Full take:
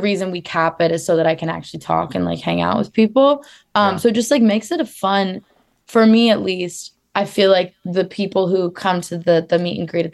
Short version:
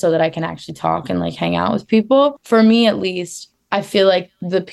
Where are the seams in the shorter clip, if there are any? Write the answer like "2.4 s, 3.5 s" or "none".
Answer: 2.4 s